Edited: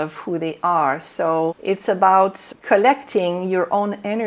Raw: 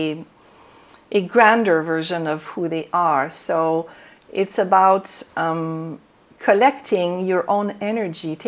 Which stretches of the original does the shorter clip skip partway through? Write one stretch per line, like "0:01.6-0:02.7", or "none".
0:03.9-0:04.3
0:05.2-0:06.2